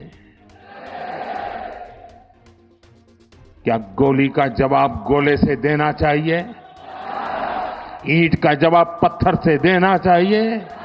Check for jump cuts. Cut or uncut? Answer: uncut